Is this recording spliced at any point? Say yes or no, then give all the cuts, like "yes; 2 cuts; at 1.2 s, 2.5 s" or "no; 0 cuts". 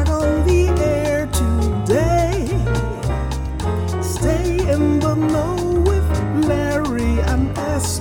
no; 0 cuts